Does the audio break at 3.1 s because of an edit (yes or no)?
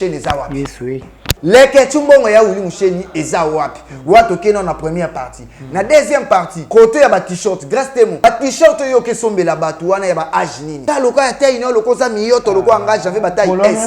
no